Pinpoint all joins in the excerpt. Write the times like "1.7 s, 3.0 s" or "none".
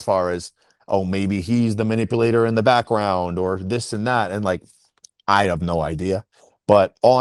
none